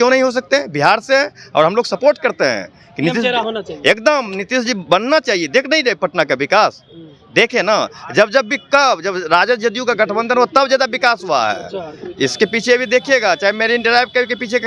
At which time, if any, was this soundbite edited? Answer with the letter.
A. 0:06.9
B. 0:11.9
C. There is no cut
C